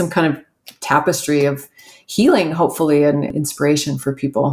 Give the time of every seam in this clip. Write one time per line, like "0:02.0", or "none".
0:03.3